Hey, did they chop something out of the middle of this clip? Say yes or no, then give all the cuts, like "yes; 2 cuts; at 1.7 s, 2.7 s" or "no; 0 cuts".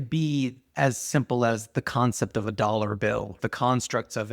yes; 1 cut; at 3.4 s